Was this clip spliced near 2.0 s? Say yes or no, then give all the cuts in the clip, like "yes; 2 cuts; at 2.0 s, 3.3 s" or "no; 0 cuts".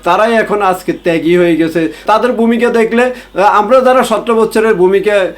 yes; 1 cut; at 2.0 s